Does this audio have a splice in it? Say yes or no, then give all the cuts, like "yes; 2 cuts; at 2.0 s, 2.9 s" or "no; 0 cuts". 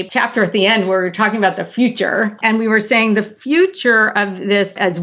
yes; 1 cut; at 2.3 s